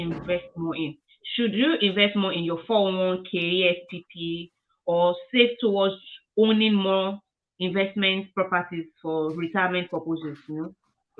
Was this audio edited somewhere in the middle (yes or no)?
no